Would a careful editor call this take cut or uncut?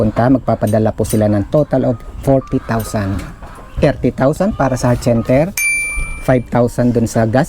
uncut